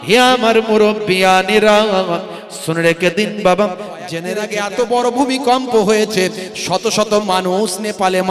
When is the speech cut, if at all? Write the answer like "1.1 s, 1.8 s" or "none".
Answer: 4.3 s